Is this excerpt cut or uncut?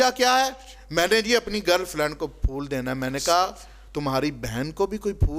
uncut